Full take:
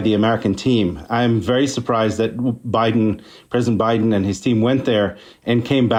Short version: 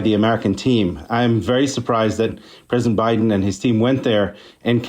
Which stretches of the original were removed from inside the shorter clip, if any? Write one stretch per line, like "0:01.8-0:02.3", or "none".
0:02.4-0:03.2